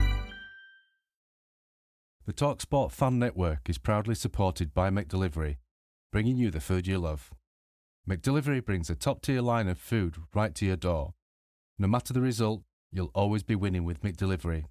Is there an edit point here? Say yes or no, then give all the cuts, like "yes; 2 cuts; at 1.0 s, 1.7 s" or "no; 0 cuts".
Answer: yes; 1 cut; at 1.4 s